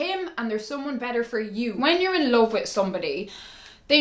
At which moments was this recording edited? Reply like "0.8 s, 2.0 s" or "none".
1.7 s